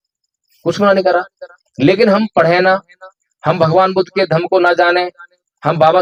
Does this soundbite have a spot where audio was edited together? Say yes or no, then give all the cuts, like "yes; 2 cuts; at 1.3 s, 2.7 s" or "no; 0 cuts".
no; 0 cuts